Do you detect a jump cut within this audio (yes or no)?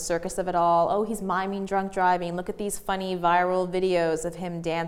no